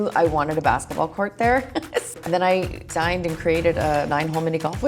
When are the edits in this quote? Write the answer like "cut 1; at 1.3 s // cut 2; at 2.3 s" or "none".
cut 1; at 2.1 s // cut 2; at 2.9 s